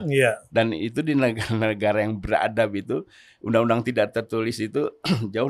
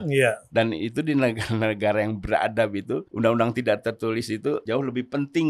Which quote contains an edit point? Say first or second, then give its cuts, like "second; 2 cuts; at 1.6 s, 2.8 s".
second; 2 cuts; at 3.1 s, 4.6 s